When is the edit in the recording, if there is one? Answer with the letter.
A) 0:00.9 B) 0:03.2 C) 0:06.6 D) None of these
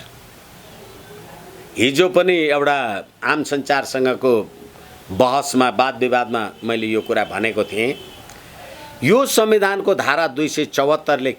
A